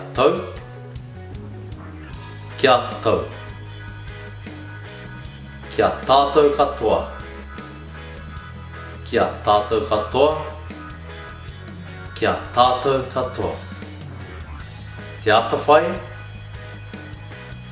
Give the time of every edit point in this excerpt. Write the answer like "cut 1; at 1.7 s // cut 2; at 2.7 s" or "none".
none